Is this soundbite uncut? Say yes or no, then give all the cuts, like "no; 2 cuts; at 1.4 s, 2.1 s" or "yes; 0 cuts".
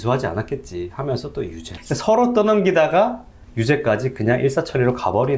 yes; 0 cuts